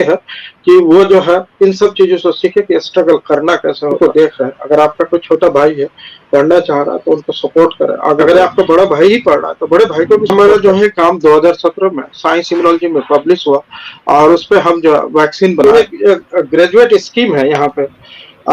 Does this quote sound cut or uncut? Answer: cut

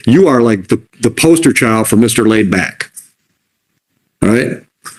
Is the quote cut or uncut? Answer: uncut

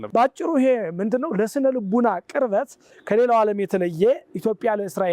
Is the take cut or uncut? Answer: uncut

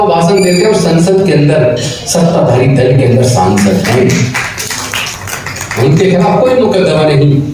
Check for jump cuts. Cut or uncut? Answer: uncut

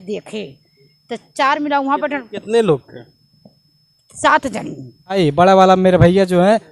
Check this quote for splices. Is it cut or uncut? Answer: cut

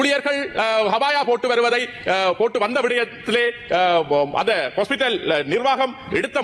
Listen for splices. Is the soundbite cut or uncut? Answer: uncut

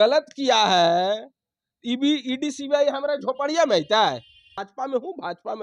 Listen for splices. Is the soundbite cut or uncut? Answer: cut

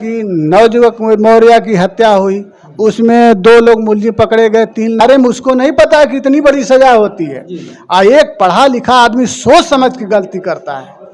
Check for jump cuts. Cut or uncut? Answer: cut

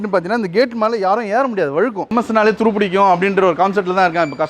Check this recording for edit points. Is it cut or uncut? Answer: cut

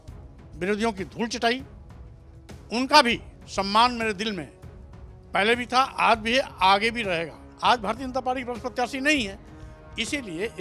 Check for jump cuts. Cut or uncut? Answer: cut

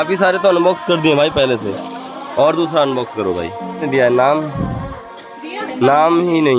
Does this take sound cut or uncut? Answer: cut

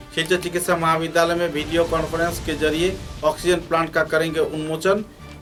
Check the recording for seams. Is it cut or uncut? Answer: uncut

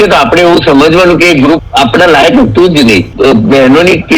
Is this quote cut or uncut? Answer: cut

